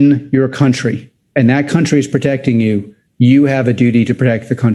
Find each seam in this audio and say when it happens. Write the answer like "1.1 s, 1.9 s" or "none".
none